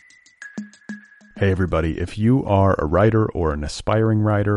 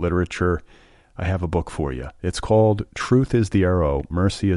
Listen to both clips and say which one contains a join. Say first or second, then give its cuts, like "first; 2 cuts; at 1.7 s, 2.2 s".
first; 1 cut; at 0.9 s